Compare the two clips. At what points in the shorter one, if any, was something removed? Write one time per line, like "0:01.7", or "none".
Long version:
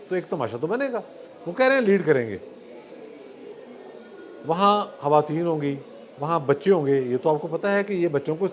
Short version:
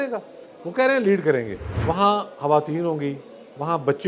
0:01.6